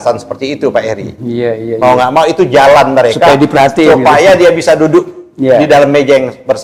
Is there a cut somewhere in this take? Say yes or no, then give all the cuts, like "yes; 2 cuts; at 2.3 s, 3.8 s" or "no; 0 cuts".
no; 0 cuts